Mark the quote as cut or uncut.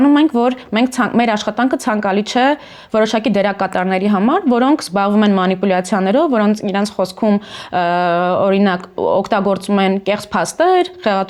uncut